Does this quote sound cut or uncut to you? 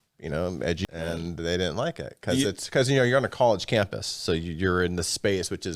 cut